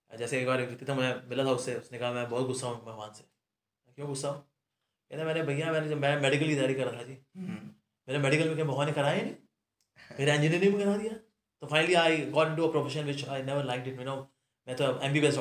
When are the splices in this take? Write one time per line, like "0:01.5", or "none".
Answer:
none